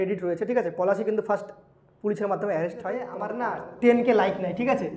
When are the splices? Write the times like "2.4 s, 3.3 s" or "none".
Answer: 3.2 s